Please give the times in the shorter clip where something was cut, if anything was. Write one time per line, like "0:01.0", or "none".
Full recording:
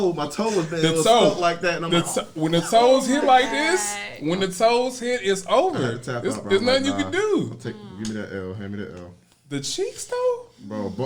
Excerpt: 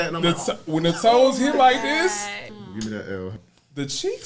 0:02.4
0:03.4